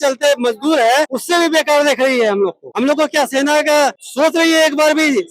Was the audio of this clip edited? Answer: yes; 3 cuts; at 1.2 s, 2.6 s, 4.0 s

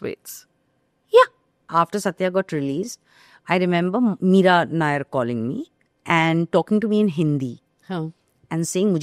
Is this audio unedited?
no; 1 cut; at 1.6 s

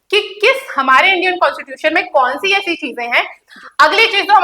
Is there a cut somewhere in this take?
yes; 1 cut; at 3.4 s

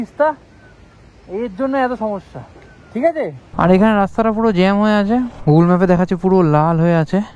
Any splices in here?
yes; 1 cut; at 3.4 s

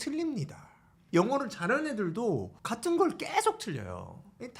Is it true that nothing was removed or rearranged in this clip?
no; 2 cuts; at 0.9 s, 2.6 s

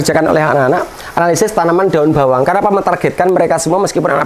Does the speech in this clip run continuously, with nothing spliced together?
yes; 0 cuts

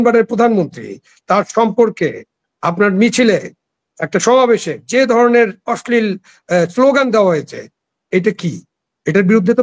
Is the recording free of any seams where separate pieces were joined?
yes; 0 cuts

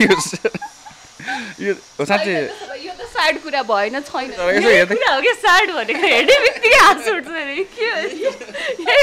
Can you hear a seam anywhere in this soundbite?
no; 0 cuts

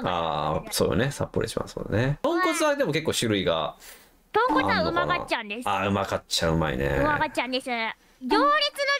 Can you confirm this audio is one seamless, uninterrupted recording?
no; 2 cuts; at 2.2 s, 8.1 s

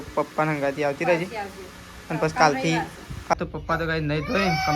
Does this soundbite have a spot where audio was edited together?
yes; 1 cut; at 3.3 s

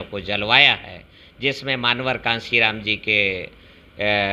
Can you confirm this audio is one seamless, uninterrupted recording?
yes; 0 cuts

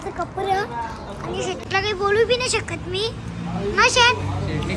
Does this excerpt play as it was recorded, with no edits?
yes; 0 cuts

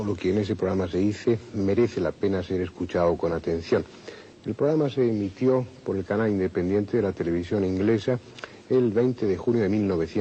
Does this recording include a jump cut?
yes; 1 cut; at 7.2 s

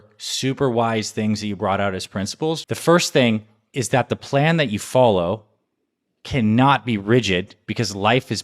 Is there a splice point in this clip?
yes; 2 cuts; at 2.6 s, 3.6 s

